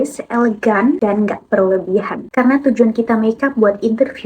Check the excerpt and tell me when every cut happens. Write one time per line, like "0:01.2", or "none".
0:01.0
0:02.2